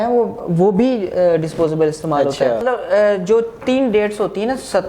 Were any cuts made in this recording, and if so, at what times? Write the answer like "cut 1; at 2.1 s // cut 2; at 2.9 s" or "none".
cut 1; at 2.6 s